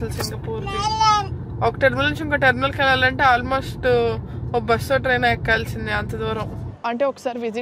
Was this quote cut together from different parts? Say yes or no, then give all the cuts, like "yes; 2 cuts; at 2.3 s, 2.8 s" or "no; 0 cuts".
yes; 1 cut; at 6.7 s